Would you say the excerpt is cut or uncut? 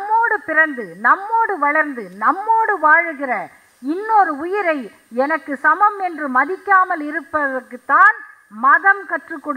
uncut